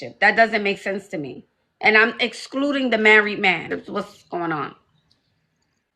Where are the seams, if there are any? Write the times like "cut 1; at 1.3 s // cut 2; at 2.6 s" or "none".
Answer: cut 1; at 3.6 s